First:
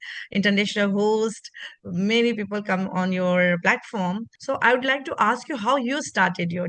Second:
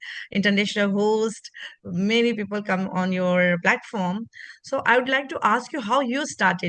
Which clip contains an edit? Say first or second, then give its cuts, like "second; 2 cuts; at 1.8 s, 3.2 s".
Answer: first; 1 cut; at 4.3 s